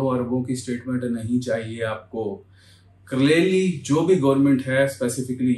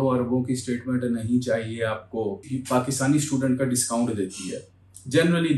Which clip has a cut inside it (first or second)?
second